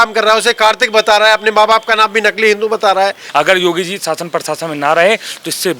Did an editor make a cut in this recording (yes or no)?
yes